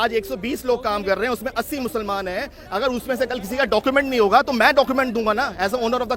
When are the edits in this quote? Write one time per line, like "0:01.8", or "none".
none

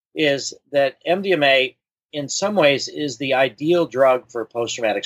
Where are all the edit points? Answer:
none

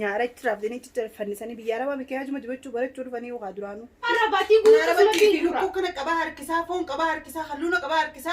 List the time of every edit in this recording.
0:04.1

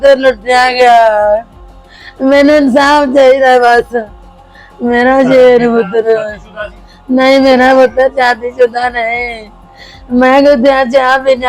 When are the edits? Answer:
none

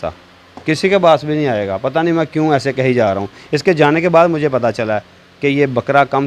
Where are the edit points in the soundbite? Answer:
none

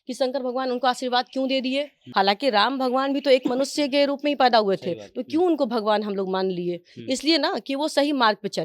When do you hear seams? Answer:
0:02.0

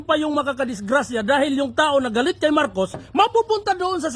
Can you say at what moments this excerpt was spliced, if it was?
none

